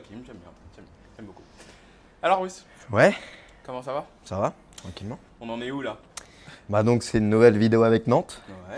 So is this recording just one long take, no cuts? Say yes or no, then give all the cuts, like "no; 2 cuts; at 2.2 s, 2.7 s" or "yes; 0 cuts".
yes; 0 cuts